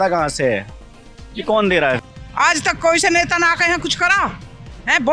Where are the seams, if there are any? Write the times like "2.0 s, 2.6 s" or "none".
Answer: 2.0 s